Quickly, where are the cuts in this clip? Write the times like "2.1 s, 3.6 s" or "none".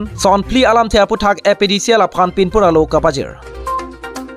3.5 s